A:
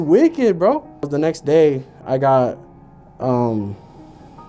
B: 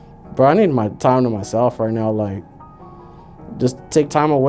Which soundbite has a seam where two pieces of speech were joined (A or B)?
A